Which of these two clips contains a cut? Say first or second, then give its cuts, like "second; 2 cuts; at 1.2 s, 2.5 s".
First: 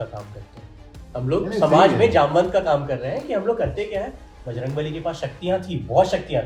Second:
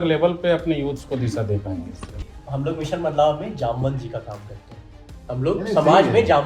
second; 1 cut; at 2.3 s